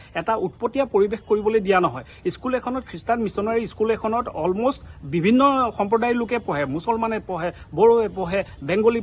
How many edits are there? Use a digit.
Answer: 0